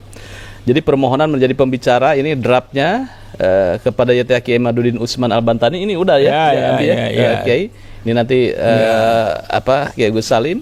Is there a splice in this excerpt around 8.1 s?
no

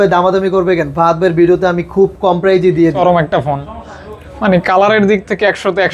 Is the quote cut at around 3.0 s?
yes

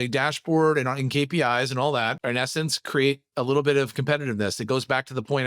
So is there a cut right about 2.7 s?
no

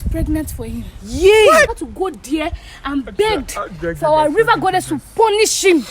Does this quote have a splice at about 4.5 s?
no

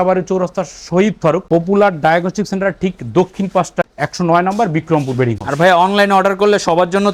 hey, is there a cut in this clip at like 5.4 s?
no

